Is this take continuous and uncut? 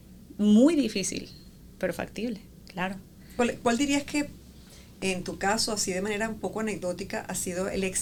yes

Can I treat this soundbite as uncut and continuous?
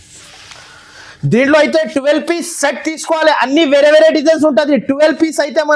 yes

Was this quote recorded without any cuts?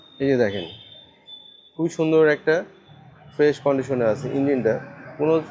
yes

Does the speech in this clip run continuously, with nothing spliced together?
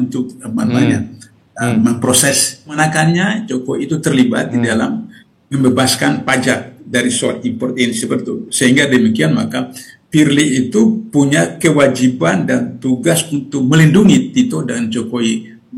no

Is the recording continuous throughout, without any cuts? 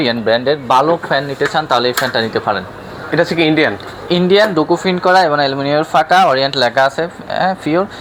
yes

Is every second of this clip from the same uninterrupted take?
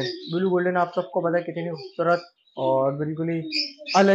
yes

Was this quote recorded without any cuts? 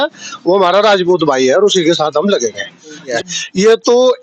no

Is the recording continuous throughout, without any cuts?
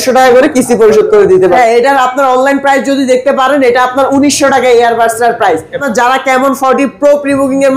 no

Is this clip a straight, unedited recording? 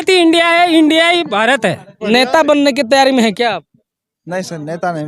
no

